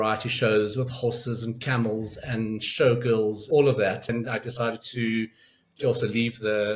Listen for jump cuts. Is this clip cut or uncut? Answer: cut